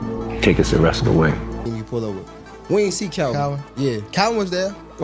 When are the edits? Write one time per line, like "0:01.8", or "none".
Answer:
0:01.7